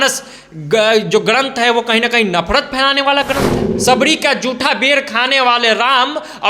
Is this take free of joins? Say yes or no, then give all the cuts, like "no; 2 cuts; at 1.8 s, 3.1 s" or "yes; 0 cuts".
no; 1 cut; at 3.6 s